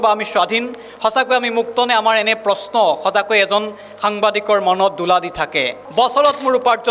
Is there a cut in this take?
yes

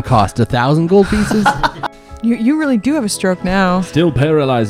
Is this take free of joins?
no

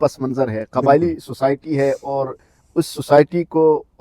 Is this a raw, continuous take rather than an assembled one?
yes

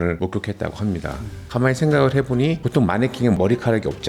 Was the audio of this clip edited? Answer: yes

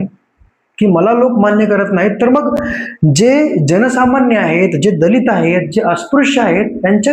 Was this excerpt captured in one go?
yes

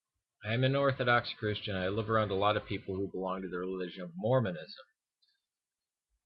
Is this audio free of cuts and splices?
yes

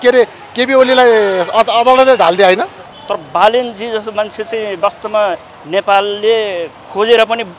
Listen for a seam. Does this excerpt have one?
yes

